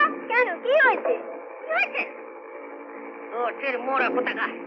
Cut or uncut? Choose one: uncut